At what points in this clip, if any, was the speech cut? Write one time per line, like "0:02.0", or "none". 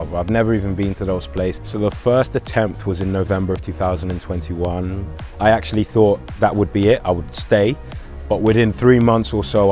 0:01.6